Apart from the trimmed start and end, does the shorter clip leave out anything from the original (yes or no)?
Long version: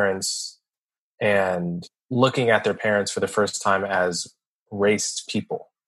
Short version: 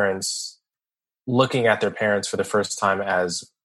yes